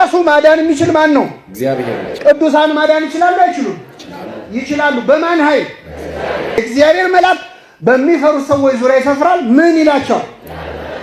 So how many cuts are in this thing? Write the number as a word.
one